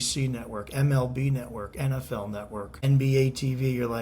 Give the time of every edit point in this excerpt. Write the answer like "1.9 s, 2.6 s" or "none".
2.7 s

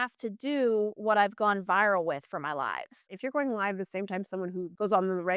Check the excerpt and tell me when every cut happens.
3.1 s

